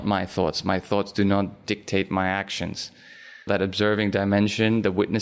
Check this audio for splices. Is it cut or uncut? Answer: cut